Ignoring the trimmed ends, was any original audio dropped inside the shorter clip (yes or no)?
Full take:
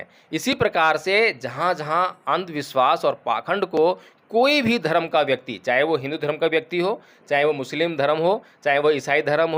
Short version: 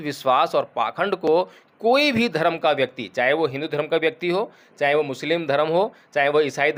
no